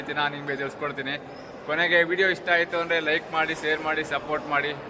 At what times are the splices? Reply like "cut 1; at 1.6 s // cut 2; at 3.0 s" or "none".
none